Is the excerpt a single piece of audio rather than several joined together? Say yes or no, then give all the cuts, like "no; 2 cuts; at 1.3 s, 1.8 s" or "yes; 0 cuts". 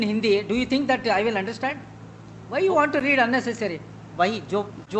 yes; 0 cuts